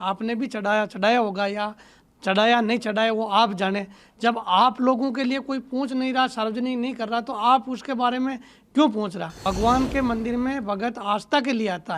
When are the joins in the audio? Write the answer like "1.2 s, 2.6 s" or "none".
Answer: 9.3 s